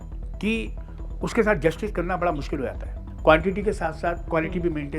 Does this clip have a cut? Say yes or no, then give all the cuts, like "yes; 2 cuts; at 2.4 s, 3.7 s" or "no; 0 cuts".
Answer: yes; 1 cut; at 3.1 s